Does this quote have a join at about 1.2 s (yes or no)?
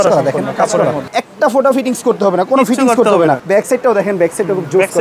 yes